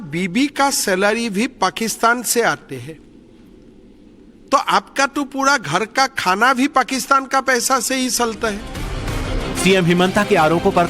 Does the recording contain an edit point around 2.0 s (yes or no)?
no